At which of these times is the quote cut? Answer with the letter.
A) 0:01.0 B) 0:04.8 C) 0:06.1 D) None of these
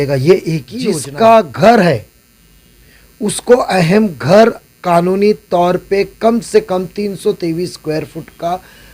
A